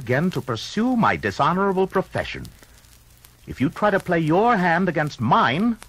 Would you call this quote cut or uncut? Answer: uncut